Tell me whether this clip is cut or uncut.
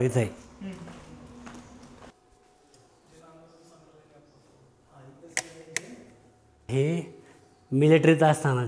uncut